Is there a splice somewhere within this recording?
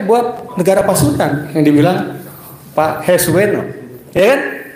no; 0 cuts

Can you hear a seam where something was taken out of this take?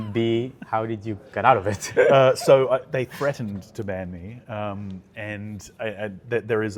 no; 0 cuts

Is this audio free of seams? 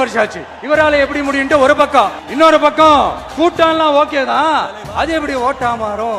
yes; 0 cuts

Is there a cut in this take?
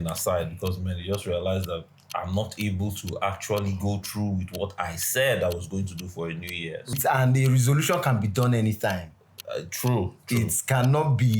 yes; 1 cut; at 6.9 s

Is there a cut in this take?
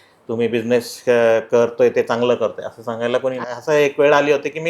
yes; 1 cut; at 3.4 s

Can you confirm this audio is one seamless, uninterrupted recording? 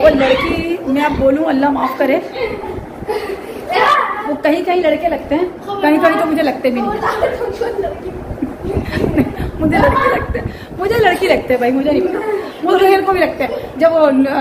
yes; 0 cuts

